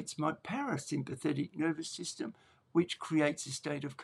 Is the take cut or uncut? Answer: cut